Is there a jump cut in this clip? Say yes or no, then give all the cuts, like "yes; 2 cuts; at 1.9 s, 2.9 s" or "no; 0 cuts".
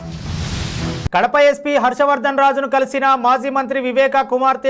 yes; 1 cut; at 1.1 s